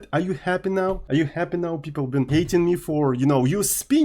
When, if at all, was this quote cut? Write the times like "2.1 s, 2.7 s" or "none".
1.0 s, 2.3 s